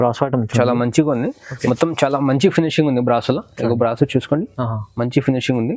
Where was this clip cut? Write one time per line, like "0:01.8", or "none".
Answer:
none